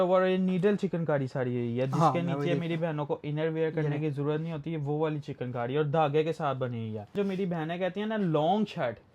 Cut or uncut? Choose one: cut